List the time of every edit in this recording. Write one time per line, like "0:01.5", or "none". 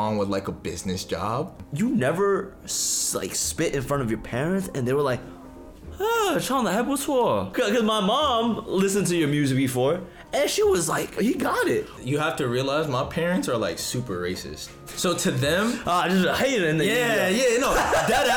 0:01.6
0:07.5
0:11.1
0:11.9